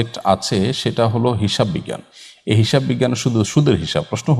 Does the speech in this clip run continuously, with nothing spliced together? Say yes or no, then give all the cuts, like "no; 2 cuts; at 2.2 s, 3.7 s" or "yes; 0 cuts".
yes; 0 cuts